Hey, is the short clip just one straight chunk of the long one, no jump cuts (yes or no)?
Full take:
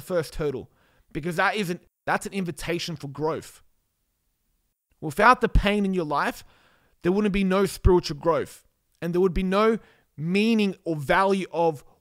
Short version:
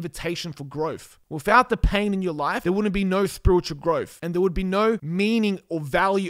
no